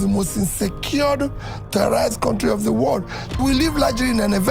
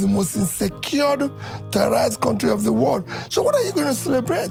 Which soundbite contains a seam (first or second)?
first